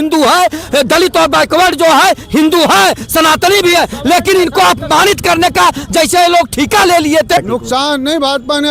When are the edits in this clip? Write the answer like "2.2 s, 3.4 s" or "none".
7.4 s

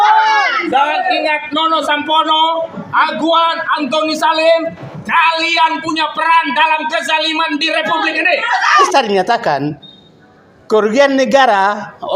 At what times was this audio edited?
8.8 s

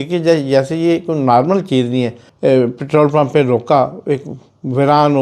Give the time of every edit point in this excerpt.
2.2 s

